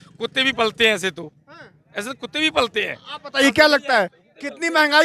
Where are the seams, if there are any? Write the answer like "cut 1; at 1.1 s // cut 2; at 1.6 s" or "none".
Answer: none